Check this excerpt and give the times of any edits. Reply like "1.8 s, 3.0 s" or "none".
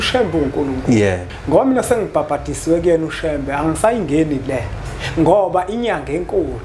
1.3 s